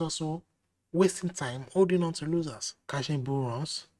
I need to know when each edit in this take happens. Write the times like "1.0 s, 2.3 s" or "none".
2.7 s